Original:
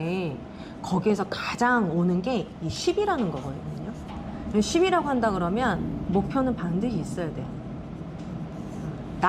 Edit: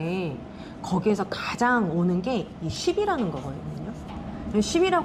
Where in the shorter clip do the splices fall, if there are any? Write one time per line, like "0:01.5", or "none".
none